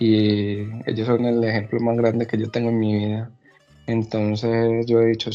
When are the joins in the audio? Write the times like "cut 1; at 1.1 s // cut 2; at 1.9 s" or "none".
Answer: none